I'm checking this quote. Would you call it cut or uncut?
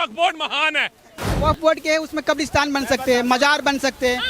cut